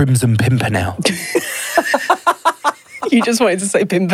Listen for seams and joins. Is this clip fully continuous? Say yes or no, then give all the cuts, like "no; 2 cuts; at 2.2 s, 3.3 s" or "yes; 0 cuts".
no; 1 cut; at 0.9 s